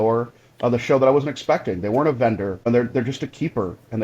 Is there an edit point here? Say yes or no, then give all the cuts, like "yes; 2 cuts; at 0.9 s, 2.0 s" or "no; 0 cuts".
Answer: yes; 1 cut; at 2.7 s